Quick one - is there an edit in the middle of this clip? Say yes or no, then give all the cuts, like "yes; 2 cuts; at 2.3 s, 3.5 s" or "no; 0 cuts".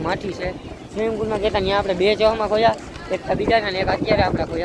no; 0 cuts